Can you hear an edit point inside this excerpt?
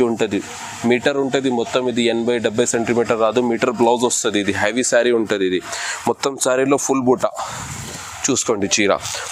no; 0 cuts

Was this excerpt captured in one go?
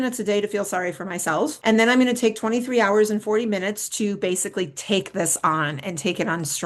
no; 1 cut; at 1.6 s

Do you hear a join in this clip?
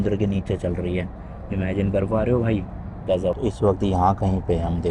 yes; 1 cut; at 3.4 s

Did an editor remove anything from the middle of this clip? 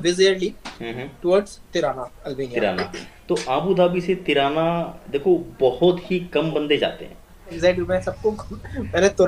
yes; 1 cut; at 7.6 s

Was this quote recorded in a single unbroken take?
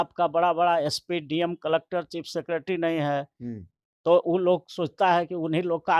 yes; 0 cuts

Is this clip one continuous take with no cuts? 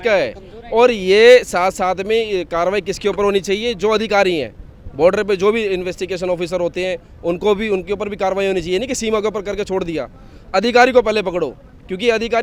yes; 0 cuts

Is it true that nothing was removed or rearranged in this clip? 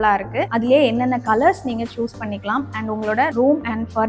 yes; 0 cuts

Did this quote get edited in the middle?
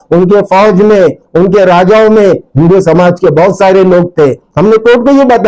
no; 0 cuts

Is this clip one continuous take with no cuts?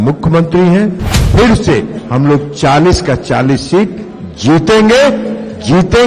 no; 1 cut; at 1.1 s

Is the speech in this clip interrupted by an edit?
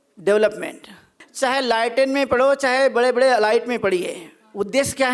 yes; 1 cut; at 1.2 s

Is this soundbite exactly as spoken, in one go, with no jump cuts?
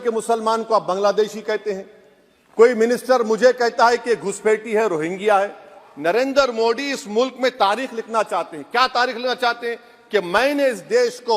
no; 1 cut; at 5.8 s

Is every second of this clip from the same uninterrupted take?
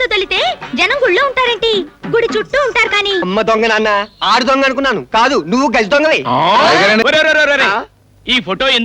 no; 2 cuts; at 3.3 s, 7.0 s

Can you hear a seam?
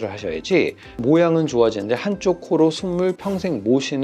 yes; 1 cut; at 1.0 s

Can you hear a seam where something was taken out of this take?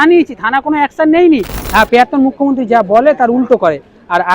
yes; 1 cut; at 1.6 s

